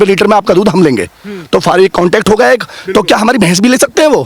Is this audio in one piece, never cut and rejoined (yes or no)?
yes